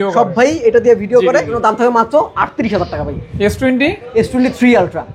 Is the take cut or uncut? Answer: cut